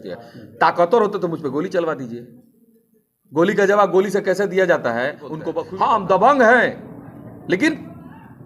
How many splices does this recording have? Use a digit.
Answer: 1